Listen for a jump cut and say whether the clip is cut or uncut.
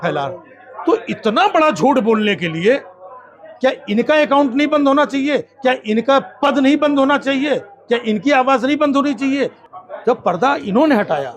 cut